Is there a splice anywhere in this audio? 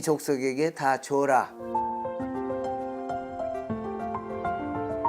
yes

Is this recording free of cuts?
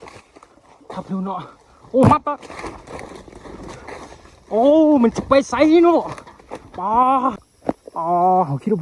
no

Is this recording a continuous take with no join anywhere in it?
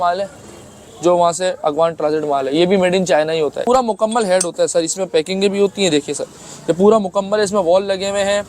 no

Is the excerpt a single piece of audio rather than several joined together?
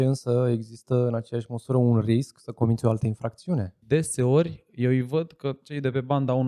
no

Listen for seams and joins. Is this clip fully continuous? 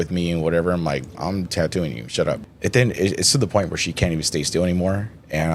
no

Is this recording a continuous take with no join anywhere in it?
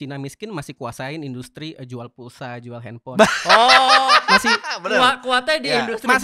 yes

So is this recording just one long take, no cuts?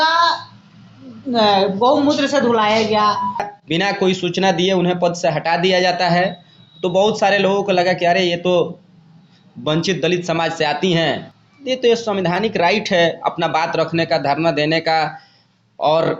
no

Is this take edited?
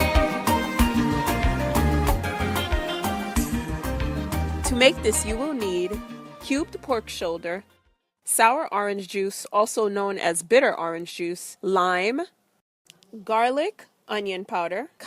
yes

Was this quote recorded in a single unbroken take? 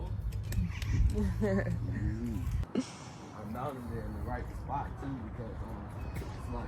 no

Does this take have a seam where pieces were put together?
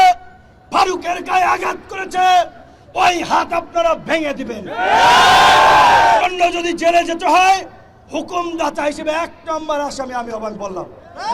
yes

